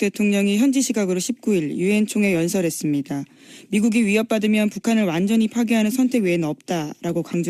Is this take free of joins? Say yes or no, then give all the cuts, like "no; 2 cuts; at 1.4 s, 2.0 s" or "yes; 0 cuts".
no; 1 cut; at 1.9 s